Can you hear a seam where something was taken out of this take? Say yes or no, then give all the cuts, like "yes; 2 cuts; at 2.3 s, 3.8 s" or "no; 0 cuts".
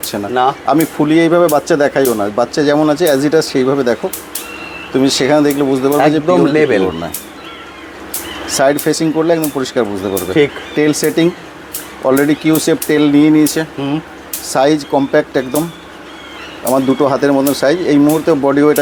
no; 0 cuts